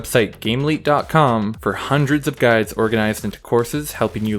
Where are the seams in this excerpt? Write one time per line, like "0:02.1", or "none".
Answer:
0:01.6